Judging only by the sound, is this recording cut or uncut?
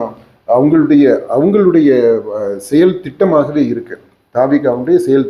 uncut